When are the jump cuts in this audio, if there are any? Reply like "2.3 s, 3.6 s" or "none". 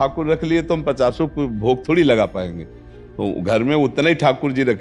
none